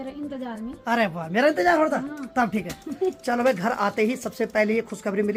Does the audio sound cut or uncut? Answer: uncut